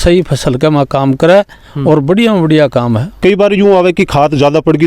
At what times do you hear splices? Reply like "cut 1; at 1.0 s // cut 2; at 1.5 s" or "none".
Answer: cut 1; at 3.1 s